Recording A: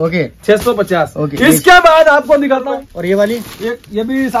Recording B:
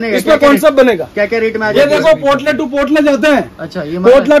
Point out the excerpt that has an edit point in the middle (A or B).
A